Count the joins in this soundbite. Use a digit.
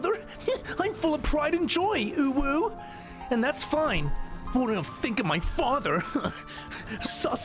0